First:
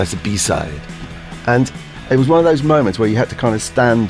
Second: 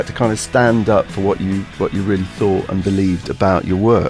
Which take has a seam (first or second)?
first